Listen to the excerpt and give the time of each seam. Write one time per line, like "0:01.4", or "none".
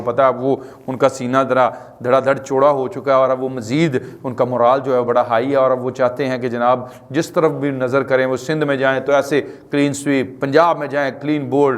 none